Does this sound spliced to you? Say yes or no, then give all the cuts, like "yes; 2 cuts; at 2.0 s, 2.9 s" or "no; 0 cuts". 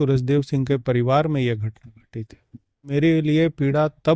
yes; 1 cut; at 2.9 s